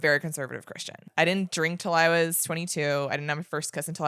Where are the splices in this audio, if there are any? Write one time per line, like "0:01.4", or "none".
0:01.0

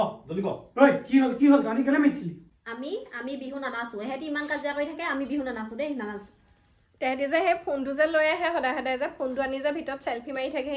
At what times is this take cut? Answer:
0:02.5

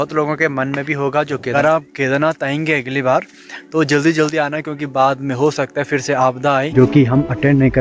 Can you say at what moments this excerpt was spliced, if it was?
0:01.5
0:06.7

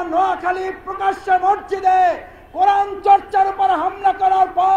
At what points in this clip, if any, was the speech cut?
none

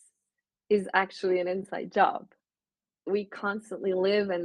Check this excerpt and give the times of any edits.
0:03.1

